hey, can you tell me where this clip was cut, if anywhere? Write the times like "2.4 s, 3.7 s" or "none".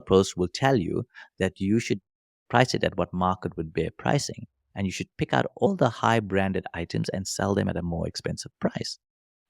5.7 s